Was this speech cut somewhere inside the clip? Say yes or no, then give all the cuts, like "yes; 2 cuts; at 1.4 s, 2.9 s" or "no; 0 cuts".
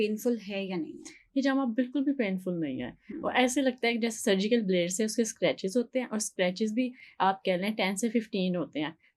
no; 0 cuts